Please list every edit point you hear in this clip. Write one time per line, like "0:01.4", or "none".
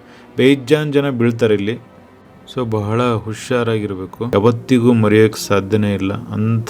0:04.3